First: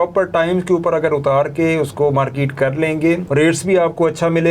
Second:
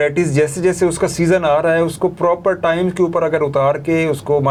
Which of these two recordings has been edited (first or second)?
first